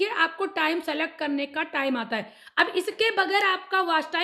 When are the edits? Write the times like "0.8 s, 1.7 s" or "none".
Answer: none